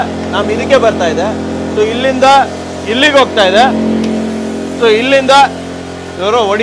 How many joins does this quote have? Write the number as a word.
zero